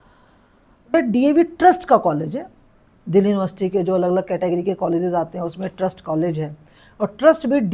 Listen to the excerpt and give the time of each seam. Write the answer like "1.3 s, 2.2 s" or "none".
0.9 s